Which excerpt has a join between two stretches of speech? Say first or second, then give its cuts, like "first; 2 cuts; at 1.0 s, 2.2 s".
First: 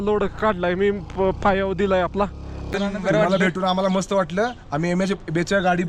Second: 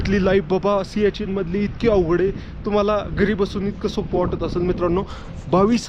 first; 1 cut; at 2.7 s